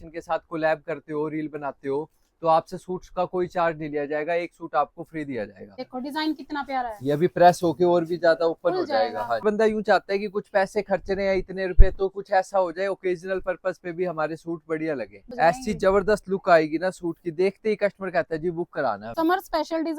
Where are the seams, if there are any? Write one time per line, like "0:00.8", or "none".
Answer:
0:05.8
0:09.4
0:15.3
0:19.1